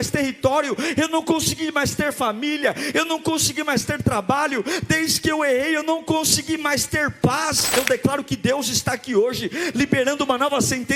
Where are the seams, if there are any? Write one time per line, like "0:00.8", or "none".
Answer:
0:07.7